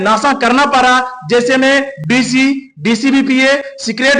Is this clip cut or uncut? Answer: uncut